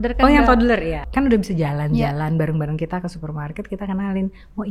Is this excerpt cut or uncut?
cut